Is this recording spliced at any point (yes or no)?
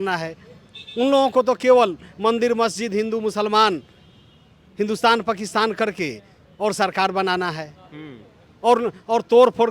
no